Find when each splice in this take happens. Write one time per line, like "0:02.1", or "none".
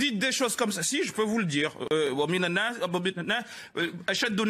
0:02.1